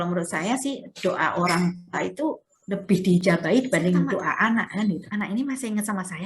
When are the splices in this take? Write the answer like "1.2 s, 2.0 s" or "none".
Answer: 5.0 s